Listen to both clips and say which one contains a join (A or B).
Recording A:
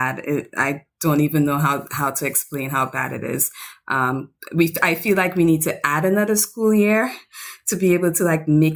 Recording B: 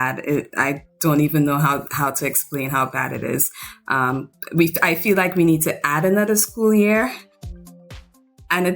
B